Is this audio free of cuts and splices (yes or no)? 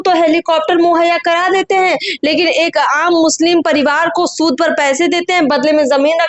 yes